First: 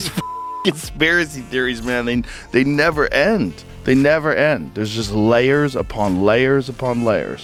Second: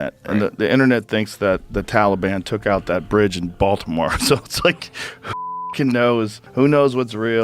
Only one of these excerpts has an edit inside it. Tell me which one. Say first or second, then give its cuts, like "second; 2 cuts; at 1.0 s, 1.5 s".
second; 1 cut; at 6.4 s